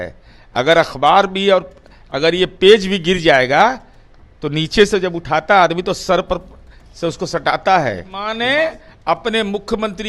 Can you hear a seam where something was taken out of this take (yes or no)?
yes